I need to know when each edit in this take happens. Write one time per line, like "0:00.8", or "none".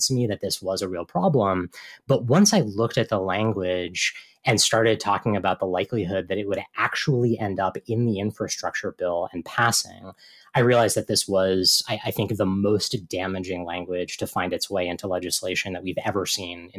none